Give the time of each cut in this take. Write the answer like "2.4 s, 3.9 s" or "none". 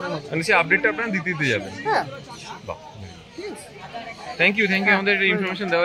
none